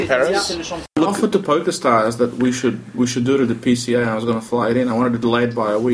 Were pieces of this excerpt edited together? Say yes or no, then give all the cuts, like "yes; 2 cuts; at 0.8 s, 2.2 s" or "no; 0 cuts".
yes; 1 cut; at 0.9 s